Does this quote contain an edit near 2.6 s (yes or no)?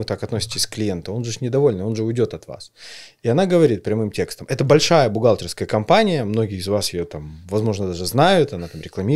no